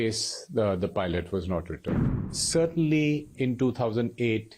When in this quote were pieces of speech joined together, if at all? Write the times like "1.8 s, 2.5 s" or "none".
2.2 s